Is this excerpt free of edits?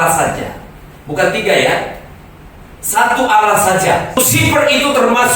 no; 1 cut; at 4.2 s

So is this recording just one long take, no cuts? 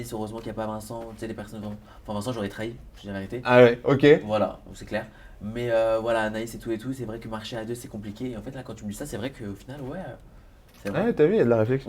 yes; 0 cuts

